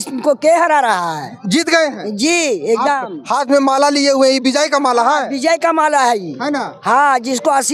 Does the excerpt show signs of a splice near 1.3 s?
no; 0 cuts

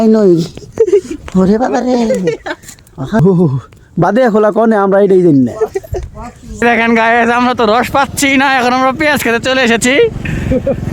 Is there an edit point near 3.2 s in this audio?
yes; 2 cuts; at 3.2 s, 6.6 s

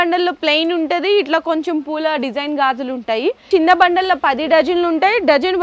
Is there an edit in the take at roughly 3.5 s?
yes; 1 cut; at 3.5 s

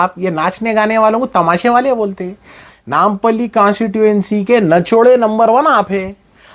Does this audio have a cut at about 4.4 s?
no; 1 cut; at 2.6 s

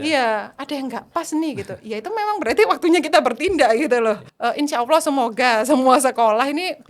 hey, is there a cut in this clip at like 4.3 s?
yes; 1 cut; at 4.3 s

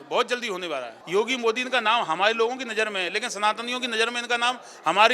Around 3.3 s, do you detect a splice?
no; 1 cut; at 0.9 s

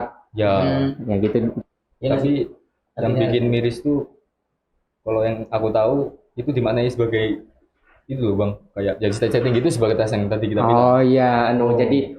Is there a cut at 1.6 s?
yes; 1 cut; at 1.6 s

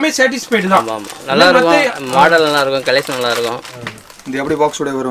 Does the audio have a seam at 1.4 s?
no; 1 cut; at 3.5 s

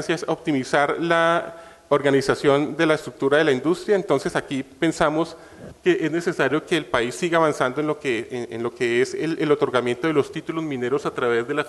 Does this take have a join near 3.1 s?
no; 1 cut; at 7.6 s

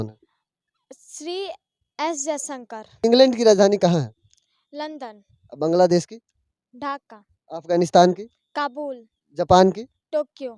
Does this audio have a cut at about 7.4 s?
no; 1 cut; at 3.0 s

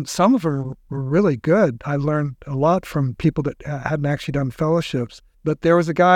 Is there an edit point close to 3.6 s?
no; 1 cut; at 5.2 s

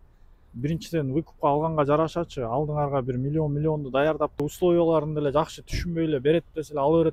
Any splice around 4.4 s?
yes; 1 cut; at 4.4 s

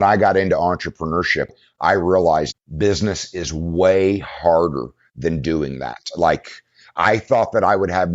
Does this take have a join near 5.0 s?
no; 3 cuts; at 1.5 s, 2.6 s, 6.9 s

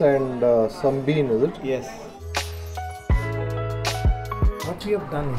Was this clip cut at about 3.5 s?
no; 1 cut; at 2.2 s

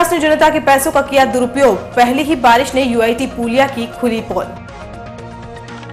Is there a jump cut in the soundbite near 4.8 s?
yes; 1 cut; at 4.8 s

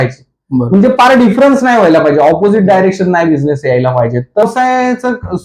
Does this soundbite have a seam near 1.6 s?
no; 1 cut; at 4.4 s

